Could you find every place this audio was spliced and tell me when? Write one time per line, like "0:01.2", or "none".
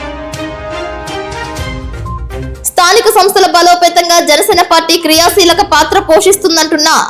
0:01.3
0:02.6